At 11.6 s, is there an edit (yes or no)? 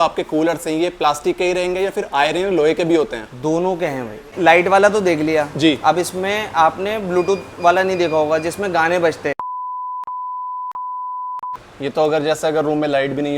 yes